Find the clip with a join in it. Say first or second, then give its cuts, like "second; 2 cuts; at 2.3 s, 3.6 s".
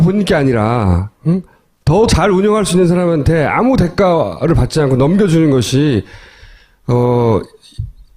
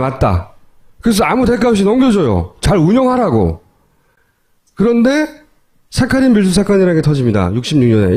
first; 1 cut; at 3.9 s